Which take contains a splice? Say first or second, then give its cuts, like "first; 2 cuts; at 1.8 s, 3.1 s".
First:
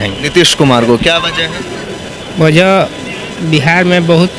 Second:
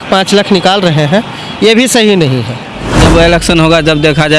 second; 1 cut; at 2.9 s